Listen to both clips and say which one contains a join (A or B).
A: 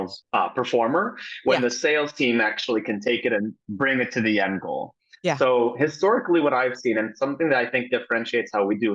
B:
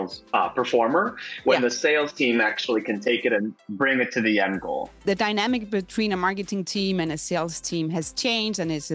B